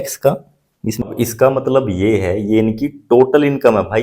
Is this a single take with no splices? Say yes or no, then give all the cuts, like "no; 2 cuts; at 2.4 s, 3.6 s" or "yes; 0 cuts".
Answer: no; 1 cut; at 1.1 s